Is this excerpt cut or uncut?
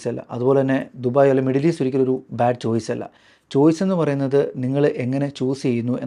uncut